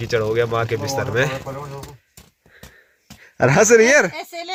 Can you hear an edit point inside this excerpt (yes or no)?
no